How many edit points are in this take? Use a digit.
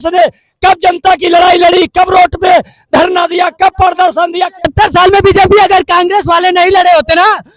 1